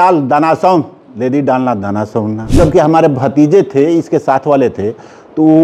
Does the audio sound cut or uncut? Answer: cut